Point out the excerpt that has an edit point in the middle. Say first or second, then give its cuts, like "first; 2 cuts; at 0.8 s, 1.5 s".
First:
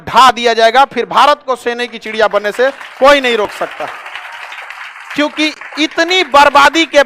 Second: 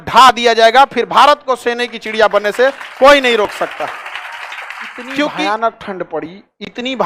second; 1 cut; at 5.3 s